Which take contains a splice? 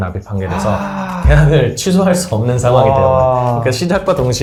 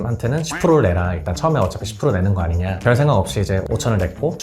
second; 2 cuts; at 2.8 s, 3.7 s

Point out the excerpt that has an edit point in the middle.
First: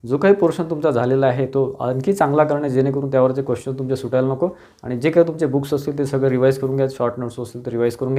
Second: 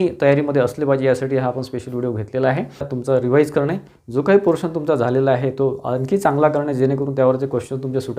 second; 1 cut; at 2.9 s

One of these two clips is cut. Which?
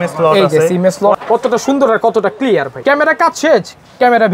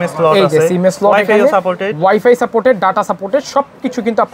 first; 2 cuts; at 1.1 s, 2.7 s

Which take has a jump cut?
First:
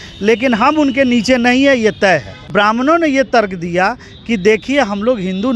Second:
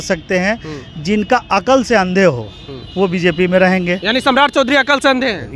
first; 1 cut; at 2.5 s

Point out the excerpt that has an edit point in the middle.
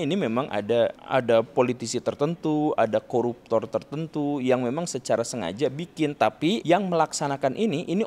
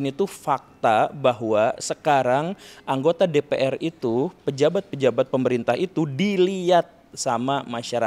first; 2 cuts; at 1.0 s, 6.6 s

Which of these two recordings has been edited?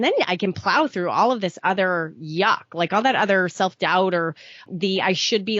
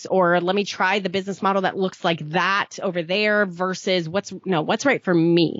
first; 1 cut; at 4.7 s

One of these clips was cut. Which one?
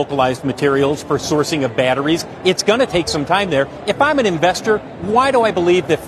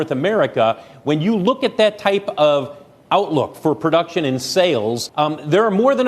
second; 1 cut; at 5.0 s

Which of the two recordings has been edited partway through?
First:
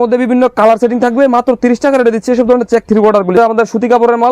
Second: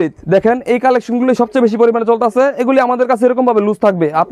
first; 1 cut; at 3.3 s

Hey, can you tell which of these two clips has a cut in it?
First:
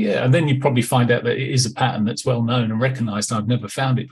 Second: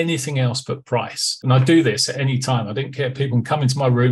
second; 1 cut; at 1.2 s

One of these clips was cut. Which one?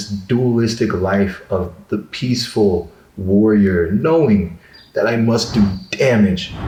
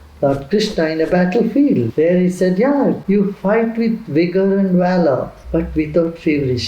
second; 3 cuts; at 1.9 s, 3.0 s, 5.4 s

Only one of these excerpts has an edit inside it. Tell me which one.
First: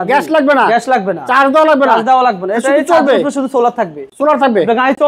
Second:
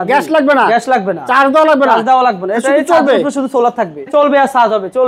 second; 1 cut; at 4.1 s

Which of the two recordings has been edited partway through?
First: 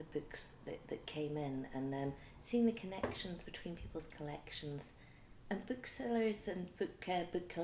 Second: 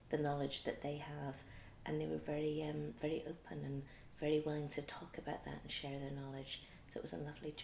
second; 1 cut; at 5.9 s

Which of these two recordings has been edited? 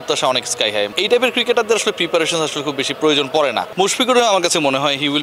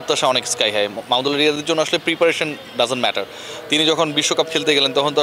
first; 2 cuts; at 0.9 s, 3.7 s

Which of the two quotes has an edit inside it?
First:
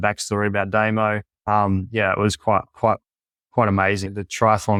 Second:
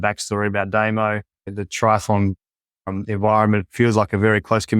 second; 1 cut; at 1.4 s

